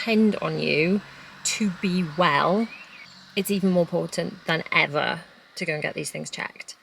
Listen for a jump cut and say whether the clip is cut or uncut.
uncut